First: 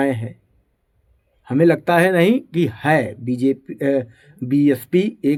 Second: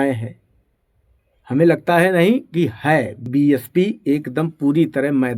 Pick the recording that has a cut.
second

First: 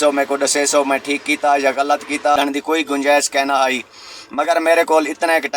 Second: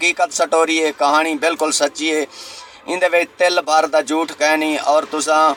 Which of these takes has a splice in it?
first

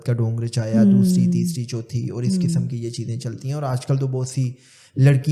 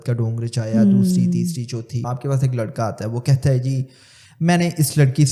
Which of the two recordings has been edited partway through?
second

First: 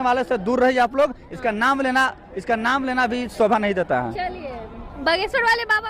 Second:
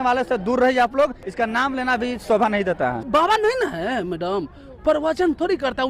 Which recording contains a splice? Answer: second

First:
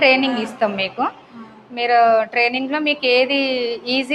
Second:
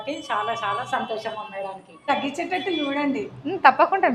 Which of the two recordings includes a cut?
second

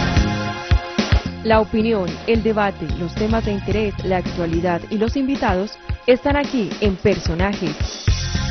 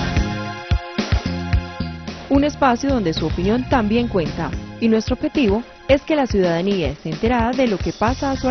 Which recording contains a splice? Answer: first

